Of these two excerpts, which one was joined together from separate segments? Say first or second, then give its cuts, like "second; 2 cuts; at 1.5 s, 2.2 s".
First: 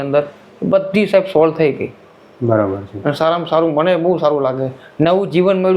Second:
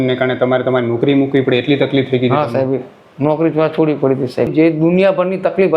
second; 1 cut; at 4.5 s